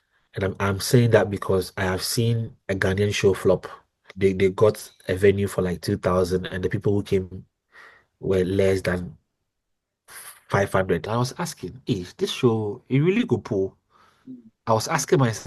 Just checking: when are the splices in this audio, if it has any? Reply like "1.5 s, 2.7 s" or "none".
4.1 s, 11.1 s